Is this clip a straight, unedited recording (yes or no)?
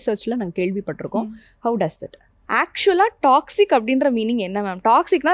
no